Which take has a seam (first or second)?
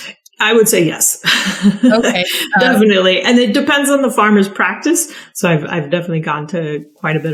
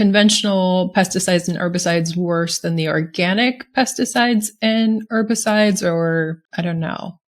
second